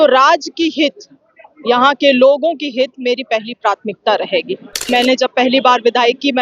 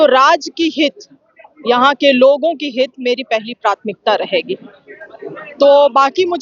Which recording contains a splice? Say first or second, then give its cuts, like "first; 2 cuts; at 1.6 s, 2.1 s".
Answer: first; 1 cut; at 4.9 s